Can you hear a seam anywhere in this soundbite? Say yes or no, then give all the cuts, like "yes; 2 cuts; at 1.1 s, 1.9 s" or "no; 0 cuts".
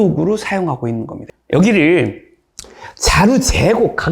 yes; 1 cut; at 1.1 s